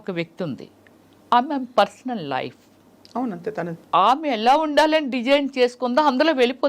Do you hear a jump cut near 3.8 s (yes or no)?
yes